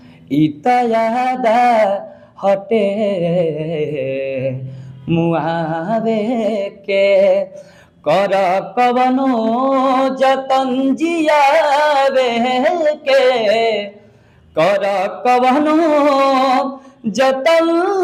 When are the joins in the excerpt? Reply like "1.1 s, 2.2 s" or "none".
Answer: none